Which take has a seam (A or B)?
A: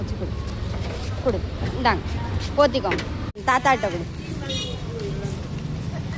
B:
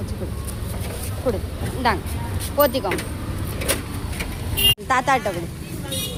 A